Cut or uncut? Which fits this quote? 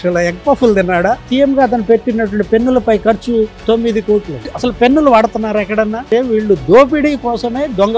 cut